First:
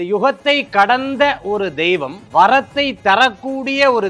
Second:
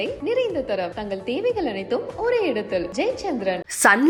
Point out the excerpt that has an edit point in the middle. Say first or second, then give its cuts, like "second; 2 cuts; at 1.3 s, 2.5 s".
first; 1 cut; at 2.2 s